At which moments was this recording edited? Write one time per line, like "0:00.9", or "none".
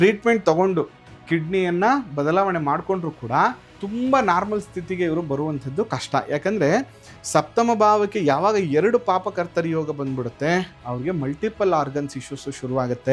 0:03.7